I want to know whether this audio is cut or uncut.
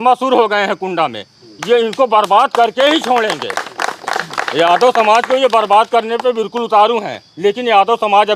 uncut